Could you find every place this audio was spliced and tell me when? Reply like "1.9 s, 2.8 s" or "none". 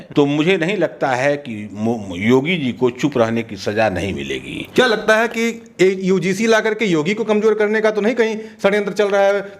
none